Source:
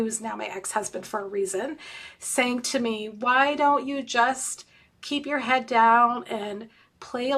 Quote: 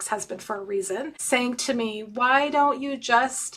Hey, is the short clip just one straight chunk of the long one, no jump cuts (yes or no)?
no